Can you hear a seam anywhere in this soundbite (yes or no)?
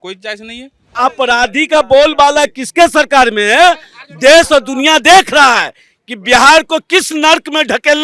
yes